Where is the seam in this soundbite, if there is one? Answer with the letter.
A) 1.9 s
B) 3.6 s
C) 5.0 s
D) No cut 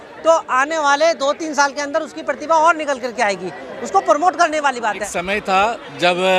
C